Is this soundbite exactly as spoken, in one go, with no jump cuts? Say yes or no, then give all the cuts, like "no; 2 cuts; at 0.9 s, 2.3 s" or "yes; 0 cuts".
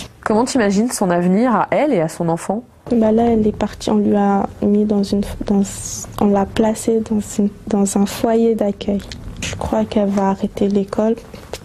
yes; 0 cuts